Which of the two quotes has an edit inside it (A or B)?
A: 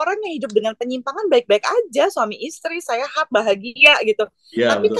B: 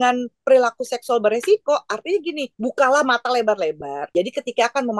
B